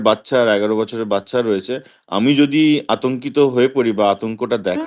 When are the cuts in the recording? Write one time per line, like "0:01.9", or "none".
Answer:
none